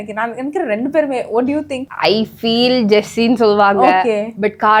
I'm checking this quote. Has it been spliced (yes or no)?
no